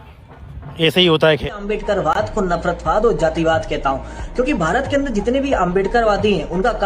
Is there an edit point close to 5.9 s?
no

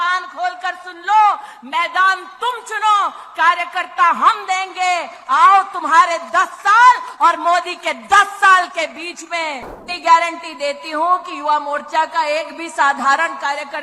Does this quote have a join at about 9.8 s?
yes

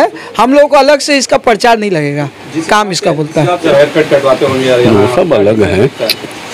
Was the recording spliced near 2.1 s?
no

